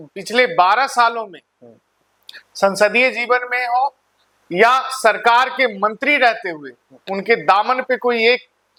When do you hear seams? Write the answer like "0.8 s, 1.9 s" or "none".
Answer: none